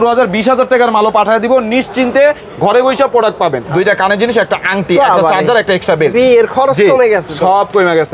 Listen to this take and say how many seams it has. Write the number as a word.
one